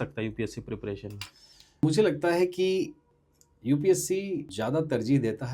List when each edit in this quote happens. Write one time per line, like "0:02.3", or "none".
0:01.8
0:03.0
0:04.5